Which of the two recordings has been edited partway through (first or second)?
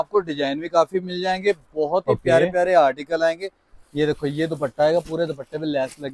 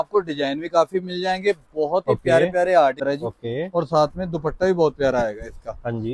second